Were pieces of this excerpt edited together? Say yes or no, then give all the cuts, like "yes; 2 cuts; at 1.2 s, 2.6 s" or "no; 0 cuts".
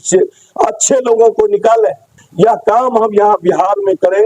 yes; 1 cut; at 2.2 s